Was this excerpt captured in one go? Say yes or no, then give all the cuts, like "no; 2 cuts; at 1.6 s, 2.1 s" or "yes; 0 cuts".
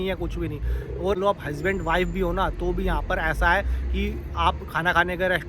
no; 1 cut; at 1.1 s